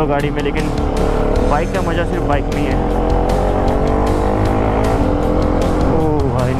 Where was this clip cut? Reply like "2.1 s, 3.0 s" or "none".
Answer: 5.0 s